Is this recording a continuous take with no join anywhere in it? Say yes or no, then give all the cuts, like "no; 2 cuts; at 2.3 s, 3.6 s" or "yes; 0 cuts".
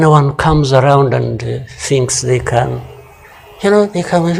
yes; 0 cuts